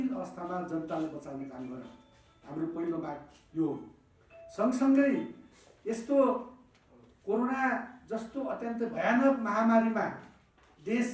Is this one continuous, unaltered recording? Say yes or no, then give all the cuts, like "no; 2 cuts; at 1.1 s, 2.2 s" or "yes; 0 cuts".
yes; 0 cuts